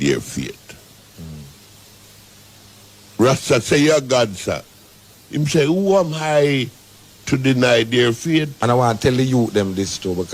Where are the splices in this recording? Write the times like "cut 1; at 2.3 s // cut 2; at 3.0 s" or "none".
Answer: cut 1; at 8.5 s